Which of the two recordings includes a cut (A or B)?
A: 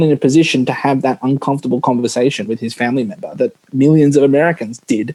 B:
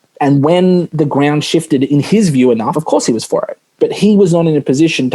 B